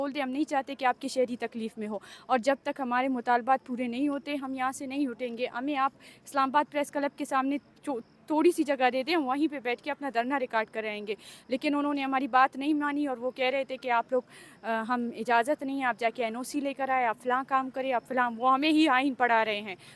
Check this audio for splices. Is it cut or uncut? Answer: uncut